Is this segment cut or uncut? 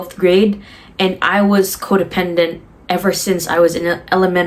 uncut